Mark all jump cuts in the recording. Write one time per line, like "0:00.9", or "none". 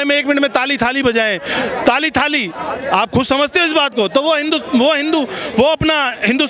none